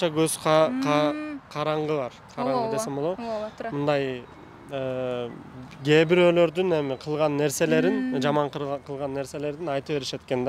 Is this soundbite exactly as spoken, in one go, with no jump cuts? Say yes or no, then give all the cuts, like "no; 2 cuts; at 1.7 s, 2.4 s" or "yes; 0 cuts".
yes; 0 cuts